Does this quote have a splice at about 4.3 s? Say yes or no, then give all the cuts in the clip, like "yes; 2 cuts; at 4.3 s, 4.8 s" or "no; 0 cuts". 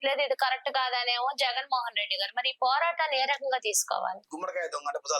yes; 1 cut; at 4.3 s